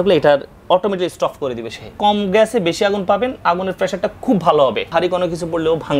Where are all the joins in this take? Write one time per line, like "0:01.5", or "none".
0:01.9
0:04.9